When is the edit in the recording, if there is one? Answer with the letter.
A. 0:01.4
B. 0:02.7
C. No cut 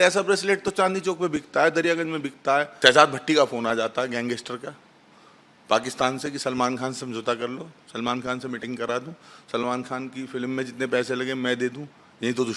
B